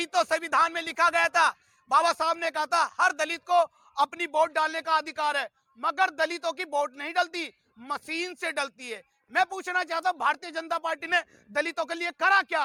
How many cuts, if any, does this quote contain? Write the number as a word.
zero